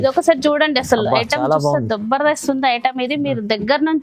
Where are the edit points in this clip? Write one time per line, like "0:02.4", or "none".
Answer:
none

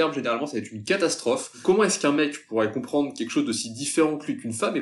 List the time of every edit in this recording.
0:01.6

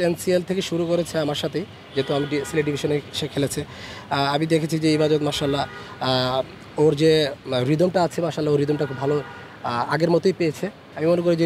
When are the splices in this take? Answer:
none

